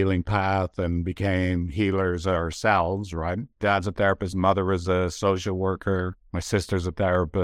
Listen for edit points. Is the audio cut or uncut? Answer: uncut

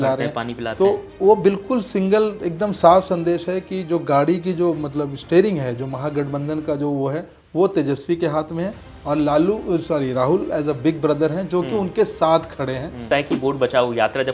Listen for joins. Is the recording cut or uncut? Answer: cut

